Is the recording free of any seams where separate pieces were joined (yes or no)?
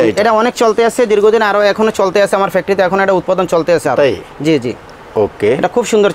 yes